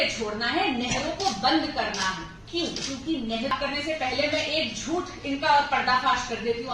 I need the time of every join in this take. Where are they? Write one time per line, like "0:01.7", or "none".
0:03.5